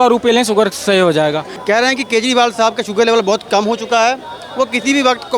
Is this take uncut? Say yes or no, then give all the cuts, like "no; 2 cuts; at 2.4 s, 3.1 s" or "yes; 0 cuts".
no; 1 cut; at 1.5 s